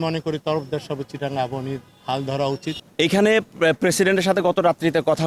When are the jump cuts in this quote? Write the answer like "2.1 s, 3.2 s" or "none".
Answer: 2.8 s